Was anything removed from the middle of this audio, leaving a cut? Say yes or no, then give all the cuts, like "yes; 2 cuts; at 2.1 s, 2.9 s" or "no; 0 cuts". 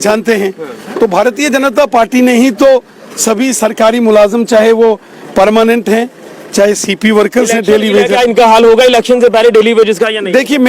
yes; 1 cut; at 8.1 s